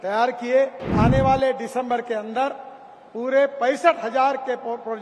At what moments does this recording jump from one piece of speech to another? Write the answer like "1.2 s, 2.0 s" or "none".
0.9 s